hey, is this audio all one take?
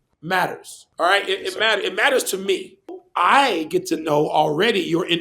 no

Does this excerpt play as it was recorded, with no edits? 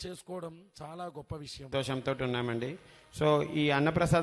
no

